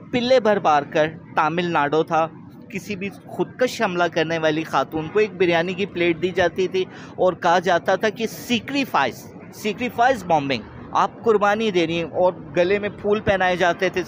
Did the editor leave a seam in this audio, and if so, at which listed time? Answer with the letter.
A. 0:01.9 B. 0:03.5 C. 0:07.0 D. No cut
D